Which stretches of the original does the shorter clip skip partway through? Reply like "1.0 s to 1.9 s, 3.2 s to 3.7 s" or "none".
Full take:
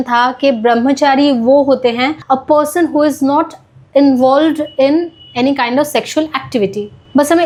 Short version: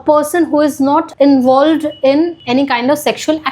3.5 s to 3.8 s, 5.1 s to 5.3 s